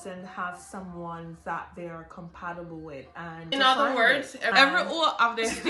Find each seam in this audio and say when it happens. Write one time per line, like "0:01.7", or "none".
0:03.5
0:04.5

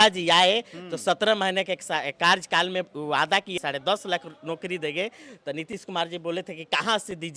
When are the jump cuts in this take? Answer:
0:03.6

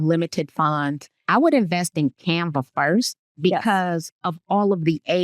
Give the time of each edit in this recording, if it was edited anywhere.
0:01.1

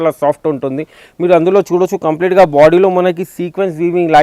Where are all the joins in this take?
none

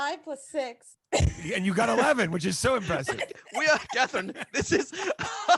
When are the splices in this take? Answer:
none

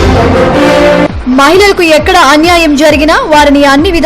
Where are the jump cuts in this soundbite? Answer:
0:01.1

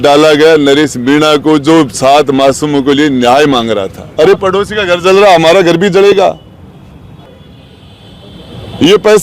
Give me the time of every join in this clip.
0:04.0
0:07.4

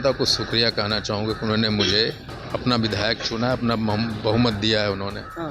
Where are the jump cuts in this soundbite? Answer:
0:02.3

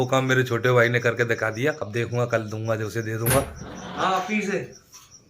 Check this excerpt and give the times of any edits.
0:01.9

